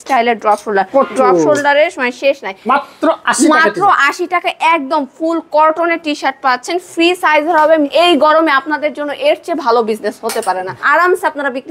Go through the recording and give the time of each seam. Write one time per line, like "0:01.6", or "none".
0:02.6
0:07.9
0:10.8